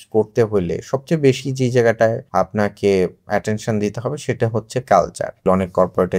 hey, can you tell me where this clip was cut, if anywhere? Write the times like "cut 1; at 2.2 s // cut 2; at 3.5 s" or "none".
cut 1; at 2.2 s // cut 2; at 5.4 s